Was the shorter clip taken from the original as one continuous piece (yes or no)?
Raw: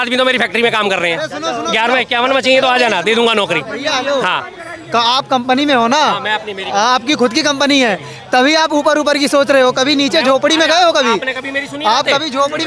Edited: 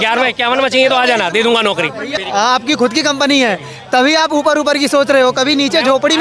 no